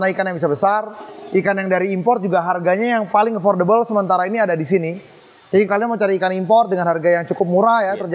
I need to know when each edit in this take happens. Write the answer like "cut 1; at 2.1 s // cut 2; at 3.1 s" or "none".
none